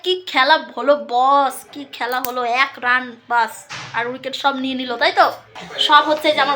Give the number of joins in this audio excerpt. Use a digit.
1